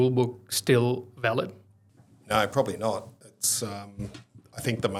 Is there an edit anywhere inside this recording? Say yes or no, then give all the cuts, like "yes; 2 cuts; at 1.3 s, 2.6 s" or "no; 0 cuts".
no; 0 cuts